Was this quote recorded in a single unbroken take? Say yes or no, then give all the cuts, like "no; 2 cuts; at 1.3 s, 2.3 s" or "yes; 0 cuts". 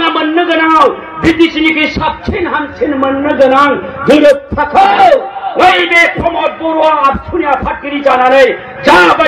yes; 0 cuts